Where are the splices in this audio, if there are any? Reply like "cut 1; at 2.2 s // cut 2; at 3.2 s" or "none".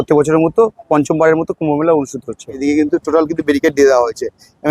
cut 1; at 2.5 s